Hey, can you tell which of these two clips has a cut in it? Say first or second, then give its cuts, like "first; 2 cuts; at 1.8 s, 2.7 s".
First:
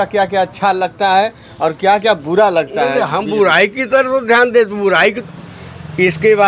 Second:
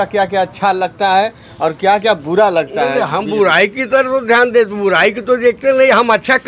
first; 1 cut; at 5.2 s